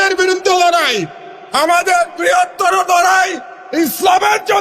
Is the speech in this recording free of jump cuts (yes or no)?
yes